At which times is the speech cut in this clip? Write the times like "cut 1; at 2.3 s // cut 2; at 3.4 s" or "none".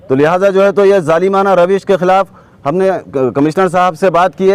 none